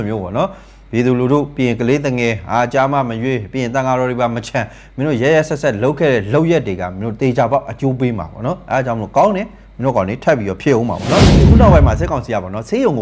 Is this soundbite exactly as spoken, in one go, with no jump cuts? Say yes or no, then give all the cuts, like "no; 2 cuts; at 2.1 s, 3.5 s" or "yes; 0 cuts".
no; 1 cut; at 11.3 s